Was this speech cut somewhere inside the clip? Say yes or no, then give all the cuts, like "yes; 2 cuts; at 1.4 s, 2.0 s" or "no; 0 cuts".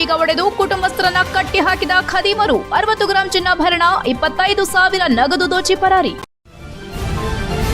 yes; 1 cut; at 6.3 s